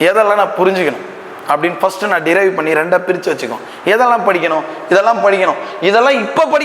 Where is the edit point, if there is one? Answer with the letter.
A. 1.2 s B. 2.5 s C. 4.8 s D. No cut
D